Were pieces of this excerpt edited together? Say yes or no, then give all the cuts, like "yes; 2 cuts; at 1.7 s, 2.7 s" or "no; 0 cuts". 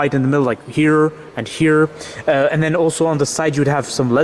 no; 0 cuts